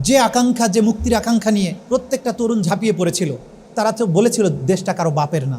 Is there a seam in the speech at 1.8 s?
yes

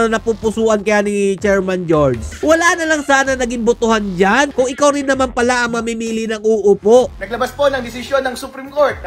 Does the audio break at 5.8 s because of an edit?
no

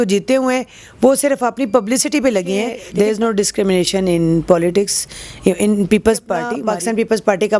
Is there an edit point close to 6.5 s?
yes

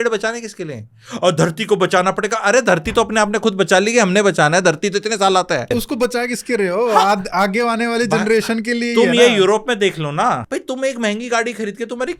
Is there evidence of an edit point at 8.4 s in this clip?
no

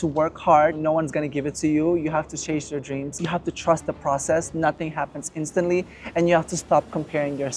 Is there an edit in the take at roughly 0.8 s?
yes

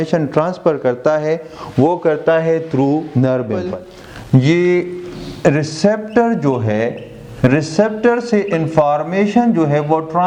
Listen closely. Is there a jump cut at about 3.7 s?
yes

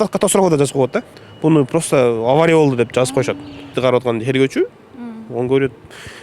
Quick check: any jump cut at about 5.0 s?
no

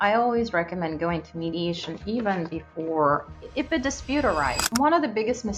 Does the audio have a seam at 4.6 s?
yes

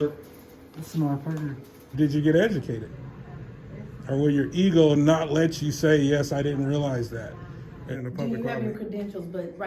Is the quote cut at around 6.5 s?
no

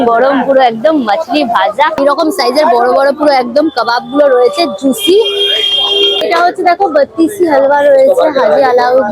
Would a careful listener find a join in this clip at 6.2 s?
yes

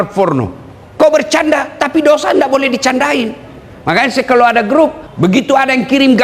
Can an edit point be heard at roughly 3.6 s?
no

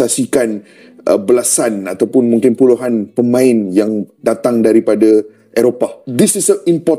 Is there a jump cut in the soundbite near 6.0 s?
yes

